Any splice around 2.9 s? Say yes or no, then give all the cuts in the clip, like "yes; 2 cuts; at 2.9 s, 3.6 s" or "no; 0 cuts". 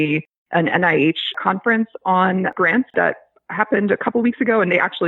yes; 2 cuts; at 1.3 s, 2.9 s